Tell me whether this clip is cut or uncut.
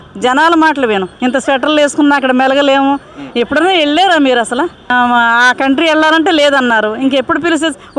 cut